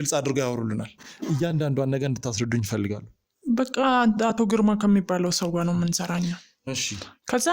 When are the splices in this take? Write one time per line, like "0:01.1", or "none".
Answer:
0:01.1